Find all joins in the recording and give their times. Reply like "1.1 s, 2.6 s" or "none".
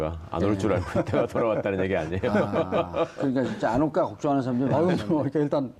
none